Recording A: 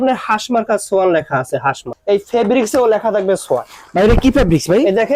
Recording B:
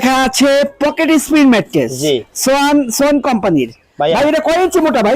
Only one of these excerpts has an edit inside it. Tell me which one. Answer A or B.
A